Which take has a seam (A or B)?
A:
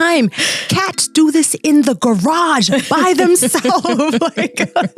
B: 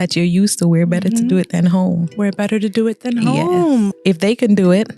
B